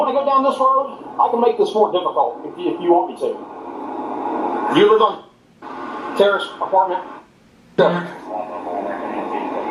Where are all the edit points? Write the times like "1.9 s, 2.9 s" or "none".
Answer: none